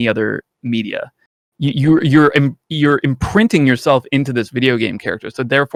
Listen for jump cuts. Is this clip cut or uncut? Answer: uncut